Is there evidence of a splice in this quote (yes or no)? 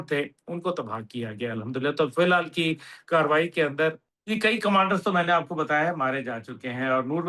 yes